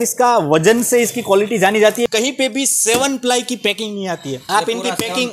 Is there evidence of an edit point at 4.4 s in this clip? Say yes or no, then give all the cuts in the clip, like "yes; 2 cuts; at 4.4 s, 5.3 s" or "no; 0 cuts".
yes; 2 cuts; at 2.1 s, 4.4 s